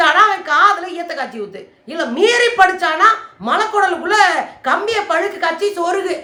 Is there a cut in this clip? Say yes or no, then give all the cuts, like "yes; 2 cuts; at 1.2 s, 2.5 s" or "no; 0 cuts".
no; 0 cuts